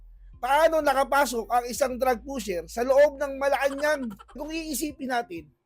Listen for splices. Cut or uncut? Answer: cut